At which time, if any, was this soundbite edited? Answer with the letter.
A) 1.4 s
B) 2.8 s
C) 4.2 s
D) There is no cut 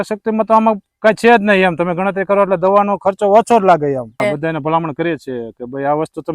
C